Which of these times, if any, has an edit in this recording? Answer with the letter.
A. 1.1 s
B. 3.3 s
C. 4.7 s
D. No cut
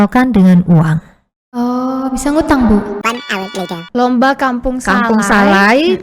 B